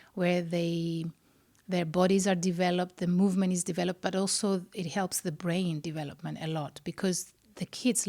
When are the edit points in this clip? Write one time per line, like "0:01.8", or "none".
none